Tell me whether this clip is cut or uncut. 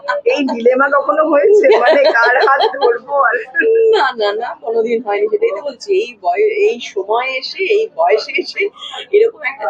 uncut